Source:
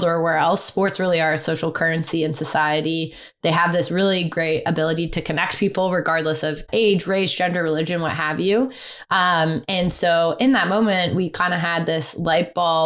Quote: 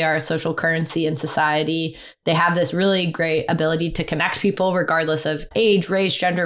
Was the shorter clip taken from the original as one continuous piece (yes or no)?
yes